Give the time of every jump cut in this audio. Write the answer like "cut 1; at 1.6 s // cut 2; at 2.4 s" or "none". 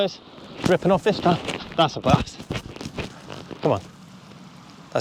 none